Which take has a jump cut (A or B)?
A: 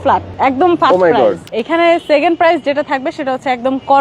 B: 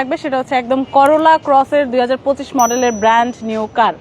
A